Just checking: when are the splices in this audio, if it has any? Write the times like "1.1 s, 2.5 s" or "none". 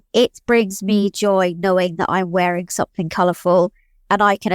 none